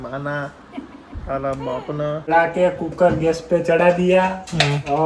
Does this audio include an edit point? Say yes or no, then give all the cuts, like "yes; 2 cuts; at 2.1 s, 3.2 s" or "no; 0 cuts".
yes; 1 cut; at 2.3 s